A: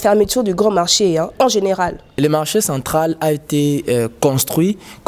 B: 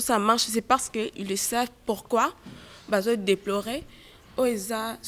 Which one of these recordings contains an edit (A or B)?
A